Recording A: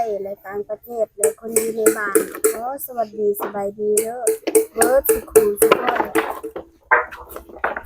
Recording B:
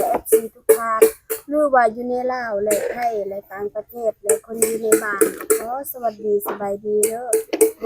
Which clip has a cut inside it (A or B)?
A